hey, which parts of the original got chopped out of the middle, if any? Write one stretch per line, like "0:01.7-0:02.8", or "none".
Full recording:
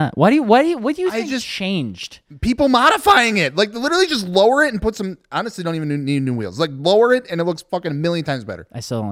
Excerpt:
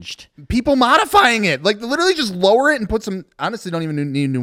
none